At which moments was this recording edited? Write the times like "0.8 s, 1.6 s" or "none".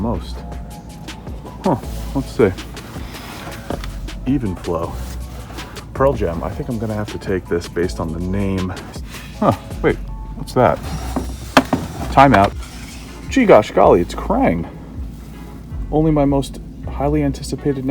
8.9 s, 12.7 s